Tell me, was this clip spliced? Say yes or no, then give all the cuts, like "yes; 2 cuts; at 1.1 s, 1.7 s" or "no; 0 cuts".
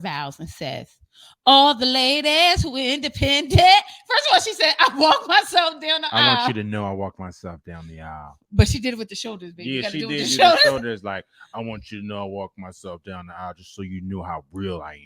no; 0 cuts